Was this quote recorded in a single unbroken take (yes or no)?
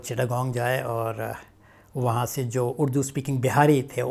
yes